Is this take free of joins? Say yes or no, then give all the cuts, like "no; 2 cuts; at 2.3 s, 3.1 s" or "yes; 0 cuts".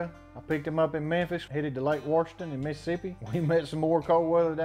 no; 1 cut; at 3.2 s